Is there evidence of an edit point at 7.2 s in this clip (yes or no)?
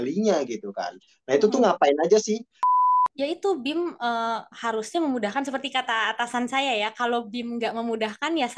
no